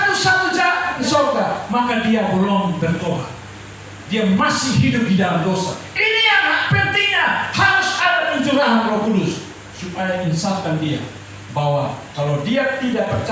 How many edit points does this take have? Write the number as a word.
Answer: one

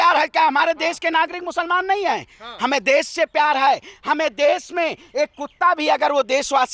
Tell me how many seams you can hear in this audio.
zero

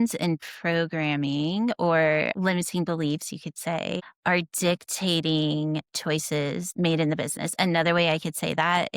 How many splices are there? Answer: zero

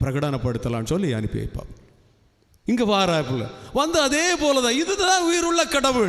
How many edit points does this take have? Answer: zero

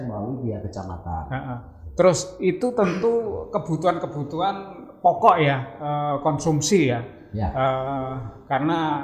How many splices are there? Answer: zero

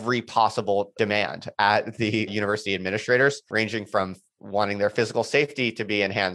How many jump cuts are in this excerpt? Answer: three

